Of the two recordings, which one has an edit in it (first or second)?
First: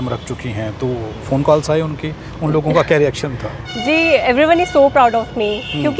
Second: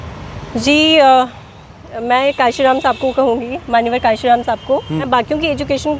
second